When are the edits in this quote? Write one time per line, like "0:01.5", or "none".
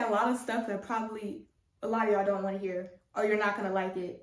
none